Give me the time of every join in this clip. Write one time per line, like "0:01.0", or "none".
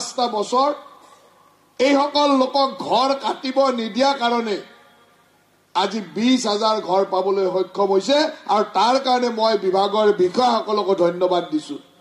none